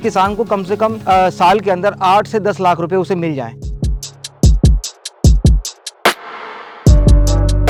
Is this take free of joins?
yes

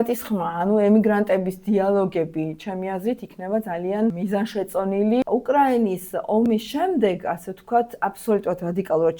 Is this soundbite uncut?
no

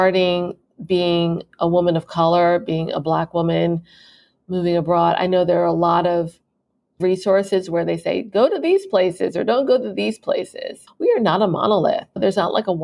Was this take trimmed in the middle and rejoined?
yes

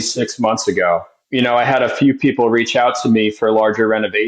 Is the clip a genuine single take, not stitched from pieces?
no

